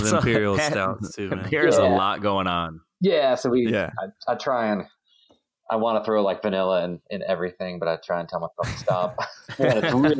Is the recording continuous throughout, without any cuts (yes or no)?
yes